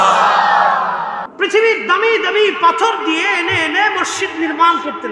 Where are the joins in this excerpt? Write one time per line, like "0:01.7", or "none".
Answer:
0:01.2